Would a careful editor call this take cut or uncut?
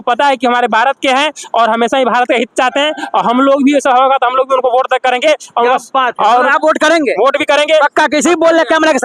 uncut